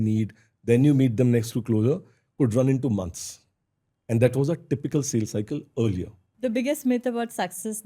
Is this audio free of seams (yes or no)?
no